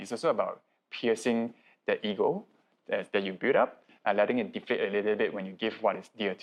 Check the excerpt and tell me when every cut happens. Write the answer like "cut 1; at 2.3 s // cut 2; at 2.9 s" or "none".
none

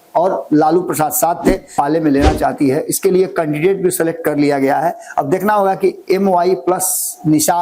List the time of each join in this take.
cut 1; at 1.7 s

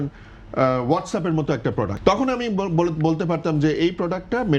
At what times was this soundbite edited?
cut 1; at 1.9 s

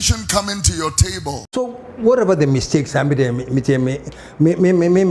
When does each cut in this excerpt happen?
cut 1; at 1.4 s

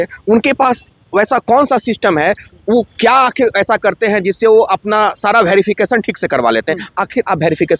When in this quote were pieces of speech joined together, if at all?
none

